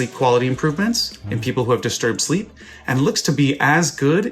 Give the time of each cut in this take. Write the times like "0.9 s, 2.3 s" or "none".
none